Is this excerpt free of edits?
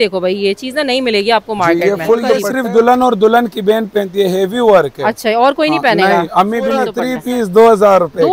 no; 2 cuts; at 2.5 s, 7.0 s

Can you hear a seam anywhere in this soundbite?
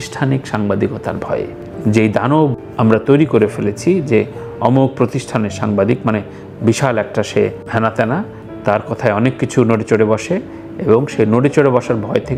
no; 0 cuts

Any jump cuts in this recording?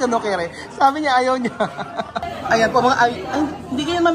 yes; 1 cut; at 2.2 s

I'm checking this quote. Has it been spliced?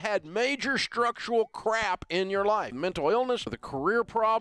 yes; 2 cuts; at 2.8 s, 3.6 s

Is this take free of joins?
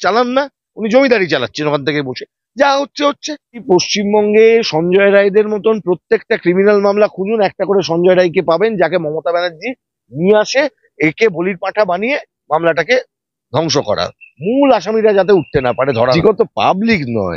no; 2 cuts; at 3.5 s, 16.0 s

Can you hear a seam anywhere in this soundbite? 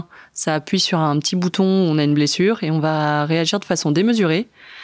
no; 0 cuts

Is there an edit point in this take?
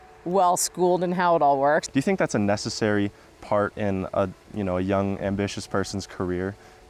yes; 2 cuts; at 1.8 s, 3.7 s

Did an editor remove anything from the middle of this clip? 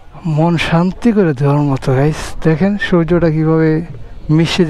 no; 0 cuts

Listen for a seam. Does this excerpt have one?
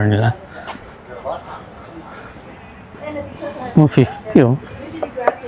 no; 0 cuts

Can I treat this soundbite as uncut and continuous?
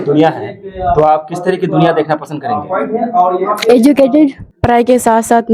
no; 1 cut; at 4.4 s

